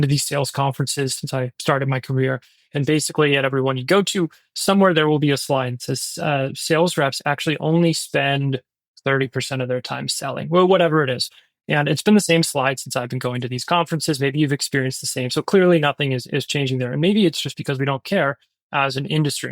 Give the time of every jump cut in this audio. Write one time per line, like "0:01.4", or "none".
0:01.2